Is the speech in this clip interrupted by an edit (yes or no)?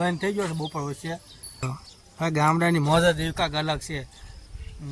yes